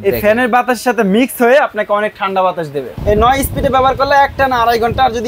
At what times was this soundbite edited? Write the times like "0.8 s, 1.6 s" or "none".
2.9 s